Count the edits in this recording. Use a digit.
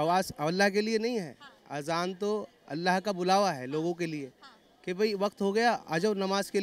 0